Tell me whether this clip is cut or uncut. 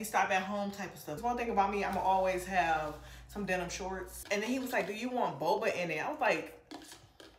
cut